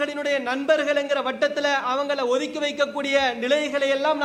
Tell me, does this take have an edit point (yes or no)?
no